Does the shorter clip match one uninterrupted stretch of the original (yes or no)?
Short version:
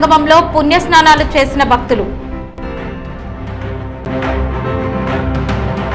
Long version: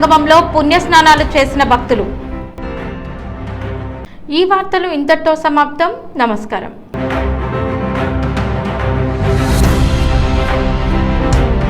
no